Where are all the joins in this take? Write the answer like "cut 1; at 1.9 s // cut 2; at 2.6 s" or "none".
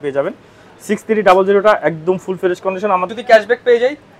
cut 1; at 3.1 s